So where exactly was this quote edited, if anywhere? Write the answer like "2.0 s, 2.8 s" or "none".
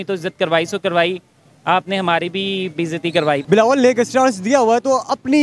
3.4 s